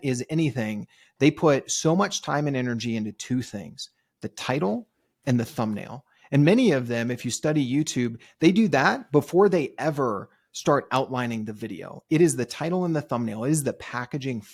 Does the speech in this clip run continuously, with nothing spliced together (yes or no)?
yes